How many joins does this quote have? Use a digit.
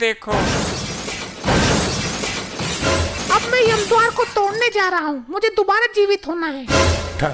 1